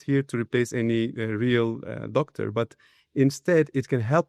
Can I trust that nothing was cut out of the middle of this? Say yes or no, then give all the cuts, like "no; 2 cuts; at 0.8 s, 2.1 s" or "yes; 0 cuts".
yes; 0 cuts